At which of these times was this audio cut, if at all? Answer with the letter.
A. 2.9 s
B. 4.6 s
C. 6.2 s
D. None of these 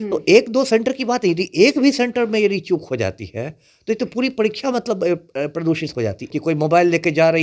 C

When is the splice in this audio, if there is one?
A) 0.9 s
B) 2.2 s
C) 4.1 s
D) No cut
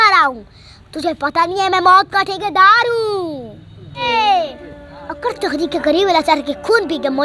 C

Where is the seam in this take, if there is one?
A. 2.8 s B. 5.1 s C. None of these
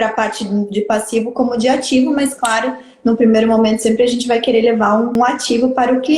B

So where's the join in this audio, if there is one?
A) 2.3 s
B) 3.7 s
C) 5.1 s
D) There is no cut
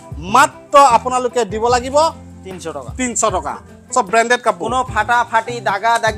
B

